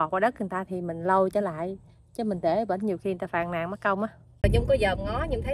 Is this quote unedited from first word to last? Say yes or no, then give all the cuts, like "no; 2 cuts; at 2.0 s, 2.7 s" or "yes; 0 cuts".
no; 1 cut; at 4.4 s